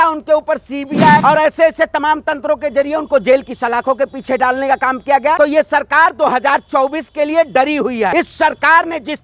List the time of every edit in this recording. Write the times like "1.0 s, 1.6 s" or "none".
1.2 s, 5.4 s, 8.1 s